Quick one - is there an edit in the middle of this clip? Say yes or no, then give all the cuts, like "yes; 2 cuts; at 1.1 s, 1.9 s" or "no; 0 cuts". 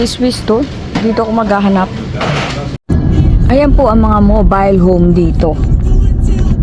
yes; 1 cut; at 2.8 s